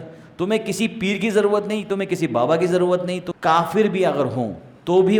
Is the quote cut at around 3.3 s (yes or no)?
yes